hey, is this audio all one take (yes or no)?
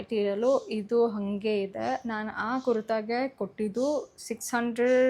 yes